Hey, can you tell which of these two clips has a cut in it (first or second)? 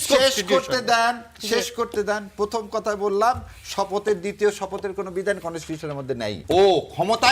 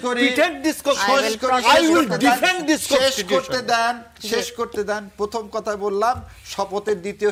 first